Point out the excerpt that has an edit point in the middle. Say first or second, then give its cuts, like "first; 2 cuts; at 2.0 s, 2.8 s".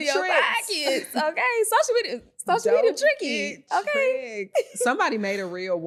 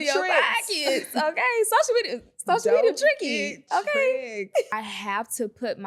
second; 1 cut; at 4.7 s